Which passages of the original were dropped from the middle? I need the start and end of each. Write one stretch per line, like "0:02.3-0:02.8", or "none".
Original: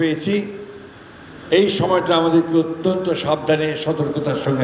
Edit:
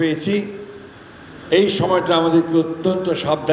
none